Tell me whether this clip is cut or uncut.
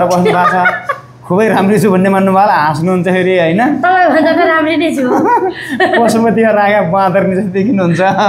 uncut